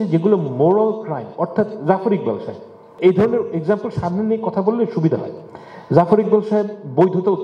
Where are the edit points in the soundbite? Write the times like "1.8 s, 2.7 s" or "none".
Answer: none